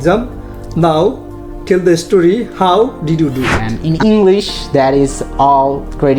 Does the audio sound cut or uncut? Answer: cut